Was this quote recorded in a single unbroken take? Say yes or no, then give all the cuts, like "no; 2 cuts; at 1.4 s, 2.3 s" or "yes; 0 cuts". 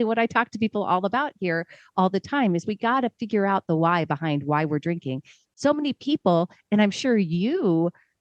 yes; 0 cuts